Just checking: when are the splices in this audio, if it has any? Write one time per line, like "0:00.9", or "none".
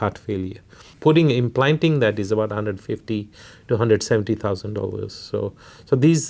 0:00.9